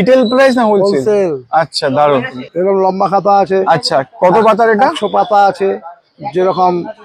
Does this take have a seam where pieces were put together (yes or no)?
no